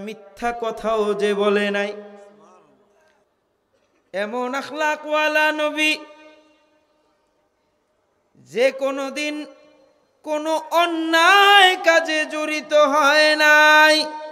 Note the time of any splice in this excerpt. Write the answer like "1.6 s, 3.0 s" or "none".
3.3 s